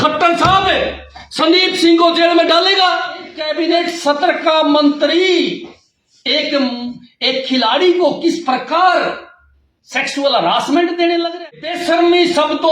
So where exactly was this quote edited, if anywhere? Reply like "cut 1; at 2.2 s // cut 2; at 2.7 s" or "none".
cut 1; at 3.4 s // cut 2; at 11.7 s

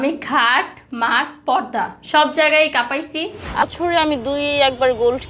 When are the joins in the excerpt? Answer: cut 1; at 3.6 s

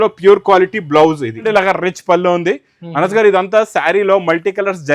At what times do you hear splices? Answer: cut 1; at 1.5 s

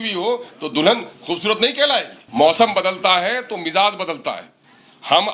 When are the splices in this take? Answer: cut 1; at 2.2 s

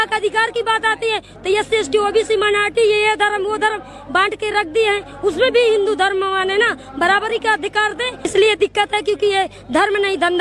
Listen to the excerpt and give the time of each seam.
cut 1; at 8.3 s

